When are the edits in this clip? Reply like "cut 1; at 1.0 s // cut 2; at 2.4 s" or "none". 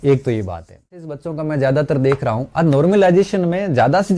cut 1; at 1.3 s